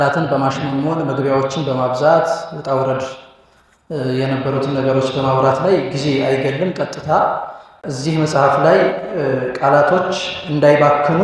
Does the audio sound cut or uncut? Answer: cut